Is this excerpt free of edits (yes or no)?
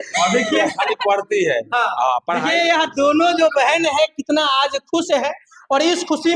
yes